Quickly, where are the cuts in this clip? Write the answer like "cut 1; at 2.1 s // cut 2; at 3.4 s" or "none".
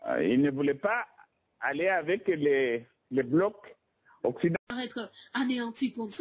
cut 1; at 4.7 s

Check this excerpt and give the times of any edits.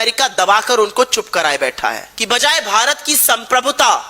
cut 1; at 2.1 s

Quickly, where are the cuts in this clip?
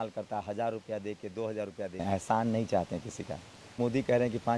cut 1; at 2.0 s // cut 2; at 3.8 s

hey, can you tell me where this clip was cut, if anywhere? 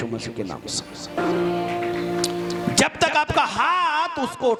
none

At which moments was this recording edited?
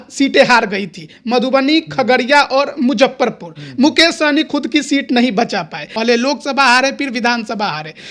cut 1; at 5.8 s

